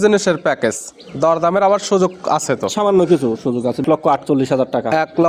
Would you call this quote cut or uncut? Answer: cut